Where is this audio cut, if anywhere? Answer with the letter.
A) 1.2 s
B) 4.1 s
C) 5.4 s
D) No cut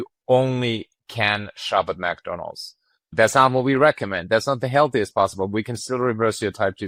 D